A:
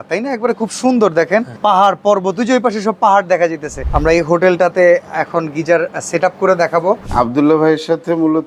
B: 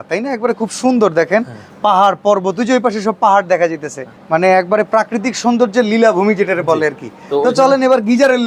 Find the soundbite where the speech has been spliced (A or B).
A